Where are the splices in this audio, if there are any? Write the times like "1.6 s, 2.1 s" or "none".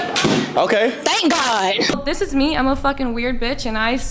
2.0 s